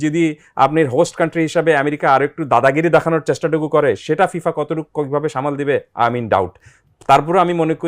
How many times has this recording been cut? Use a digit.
0